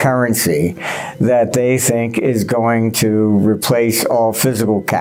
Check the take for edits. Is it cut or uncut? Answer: uncut